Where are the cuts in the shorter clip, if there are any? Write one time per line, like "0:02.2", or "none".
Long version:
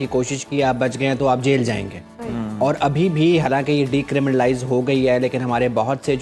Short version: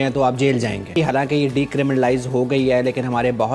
0:01.0